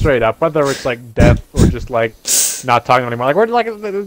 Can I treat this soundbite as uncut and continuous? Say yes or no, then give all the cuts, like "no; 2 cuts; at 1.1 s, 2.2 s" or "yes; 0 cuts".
yes; 0 cuts